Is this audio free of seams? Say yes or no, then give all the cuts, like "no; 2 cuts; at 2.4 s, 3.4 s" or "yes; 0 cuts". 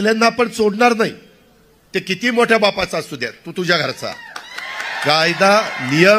yes; 0 cuts